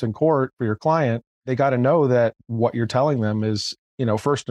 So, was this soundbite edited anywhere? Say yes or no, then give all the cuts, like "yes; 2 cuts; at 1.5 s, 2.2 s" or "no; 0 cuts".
no; 0 cuts